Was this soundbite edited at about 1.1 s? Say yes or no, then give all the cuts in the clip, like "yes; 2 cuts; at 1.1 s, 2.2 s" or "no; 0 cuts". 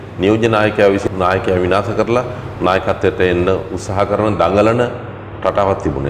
yes; 1 cut; at 1.1 s